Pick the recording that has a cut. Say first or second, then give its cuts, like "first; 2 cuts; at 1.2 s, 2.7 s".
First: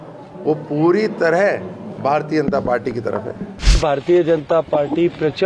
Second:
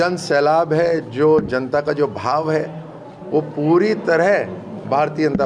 first; 1 cut; at 3.8 s